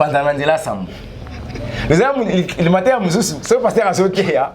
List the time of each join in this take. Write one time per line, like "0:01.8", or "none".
none